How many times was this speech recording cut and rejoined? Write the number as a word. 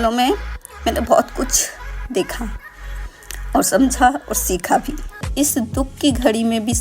one